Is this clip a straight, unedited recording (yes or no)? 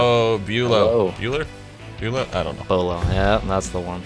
yes